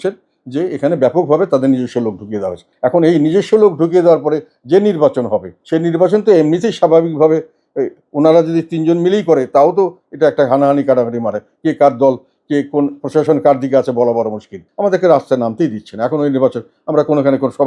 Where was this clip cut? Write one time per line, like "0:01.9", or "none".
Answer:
0:02.6
0:05.6
0:14.6